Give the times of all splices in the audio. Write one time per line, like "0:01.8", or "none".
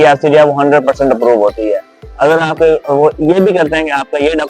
none

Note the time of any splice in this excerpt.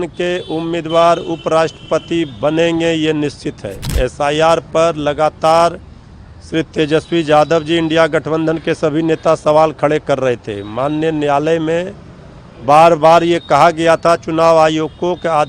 0:03.8

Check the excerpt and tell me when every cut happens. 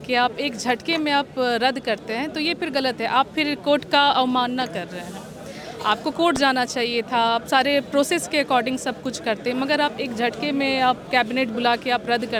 none

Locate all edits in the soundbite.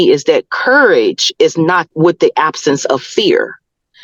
0:01.9

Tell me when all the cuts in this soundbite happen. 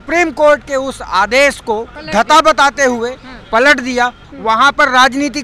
0:02.0
0:04.2

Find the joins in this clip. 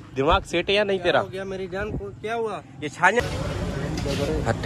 0:03.2

